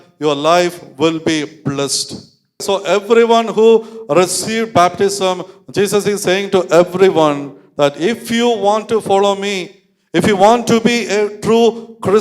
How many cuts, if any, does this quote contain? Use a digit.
1